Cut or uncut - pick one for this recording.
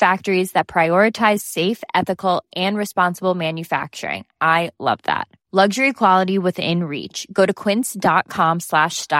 uncut